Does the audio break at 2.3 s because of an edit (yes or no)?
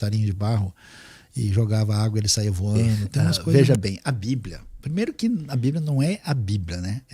no